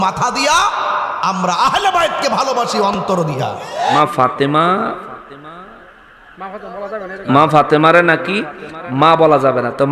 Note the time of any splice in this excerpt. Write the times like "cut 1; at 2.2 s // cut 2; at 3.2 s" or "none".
cut 1; at 4.0 s